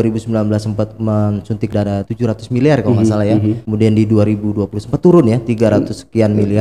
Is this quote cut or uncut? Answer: cut